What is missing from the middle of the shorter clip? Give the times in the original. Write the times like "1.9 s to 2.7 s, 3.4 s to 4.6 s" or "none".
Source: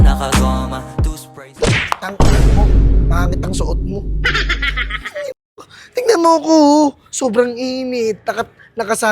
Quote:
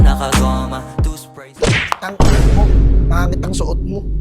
none